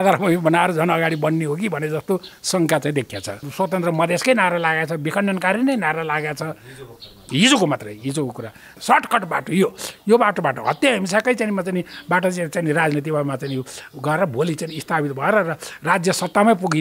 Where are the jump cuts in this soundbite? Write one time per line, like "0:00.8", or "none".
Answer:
0:03.5
0:08.7